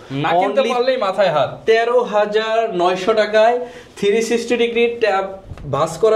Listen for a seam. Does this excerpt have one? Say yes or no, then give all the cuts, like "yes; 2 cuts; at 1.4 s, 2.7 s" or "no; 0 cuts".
no; 0 cuts